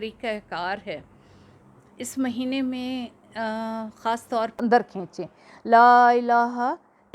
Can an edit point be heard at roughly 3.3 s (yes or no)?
no